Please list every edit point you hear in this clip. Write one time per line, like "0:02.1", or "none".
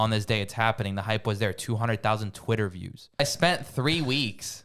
0:03.2